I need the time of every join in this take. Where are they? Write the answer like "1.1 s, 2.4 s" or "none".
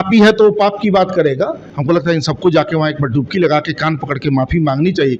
1.7 s